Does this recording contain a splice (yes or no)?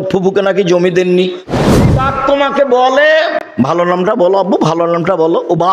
yes